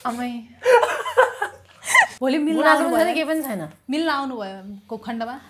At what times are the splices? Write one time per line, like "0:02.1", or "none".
0:02.1